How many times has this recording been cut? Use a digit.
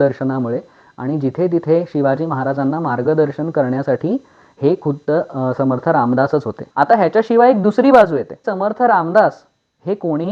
2